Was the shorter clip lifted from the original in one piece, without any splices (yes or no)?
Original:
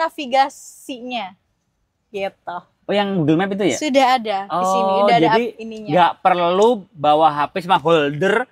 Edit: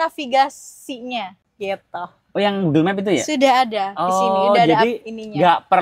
no